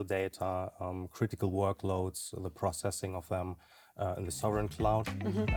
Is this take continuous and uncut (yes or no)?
yes